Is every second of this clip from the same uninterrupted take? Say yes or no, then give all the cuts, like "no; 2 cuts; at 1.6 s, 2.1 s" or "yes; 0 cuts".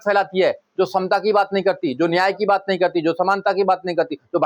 yes; 0 cuts